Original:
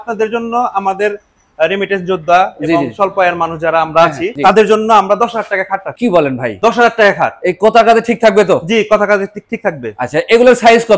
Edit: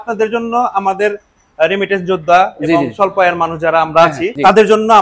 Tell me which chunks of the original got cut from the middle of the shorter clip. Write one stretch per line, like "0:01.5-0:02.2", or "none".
none